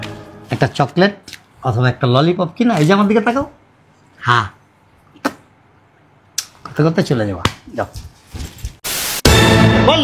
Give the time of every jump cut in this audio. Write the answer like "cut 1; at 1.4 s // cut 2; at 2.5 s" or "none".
cut 1; at 9.0 s